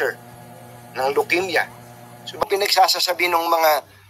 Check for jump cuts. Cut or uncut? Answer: cut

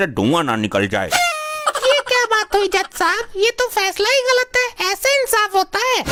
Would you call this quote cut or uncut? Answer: uncut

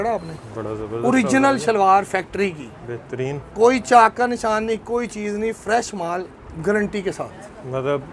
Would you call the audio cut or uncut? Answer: uncut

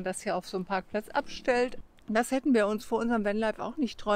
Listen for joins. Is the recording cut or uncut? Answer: cut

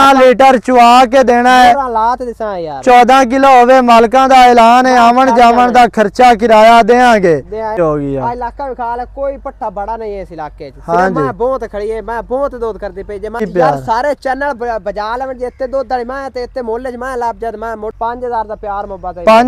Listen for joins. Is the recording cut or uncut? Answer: cut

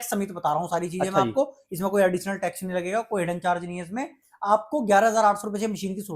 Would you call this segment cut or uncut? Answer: uncut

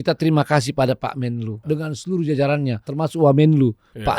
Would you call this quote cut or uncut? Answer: cut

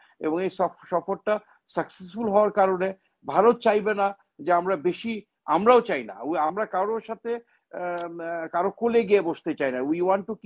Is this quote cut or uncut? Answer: uncut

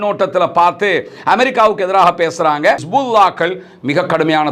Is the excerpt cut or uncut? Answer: cut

